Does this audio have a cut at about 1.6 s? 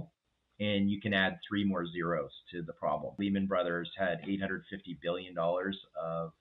no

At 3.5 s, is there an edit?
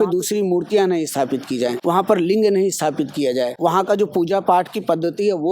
yes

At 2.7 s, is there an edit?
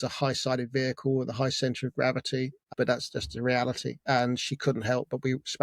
yes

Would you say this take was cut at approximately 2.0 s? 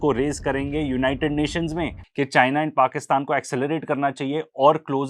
yes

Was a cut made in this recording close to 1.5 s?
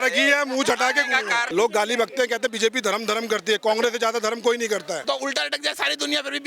yes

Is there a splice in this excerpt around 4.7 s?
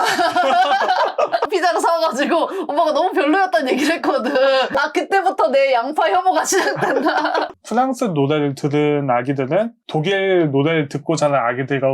yes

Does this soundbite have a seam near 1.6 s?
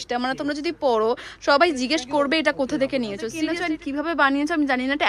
no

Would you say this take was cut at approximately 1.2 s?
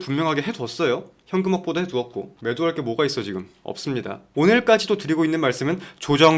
no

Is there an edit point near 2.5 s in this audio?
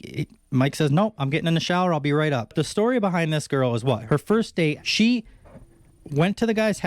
yes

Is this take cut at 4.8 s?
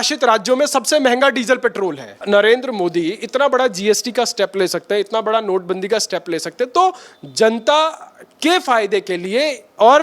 no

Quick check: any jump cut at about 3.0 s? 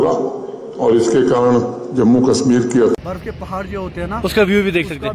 yes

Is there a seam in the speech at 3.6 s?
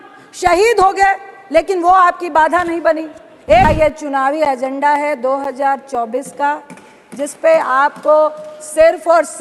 yes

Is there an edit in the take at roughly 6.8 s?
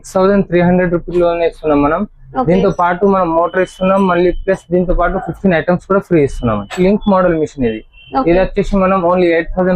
yes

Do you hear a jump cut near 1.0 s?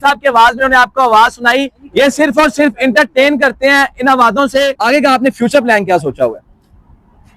no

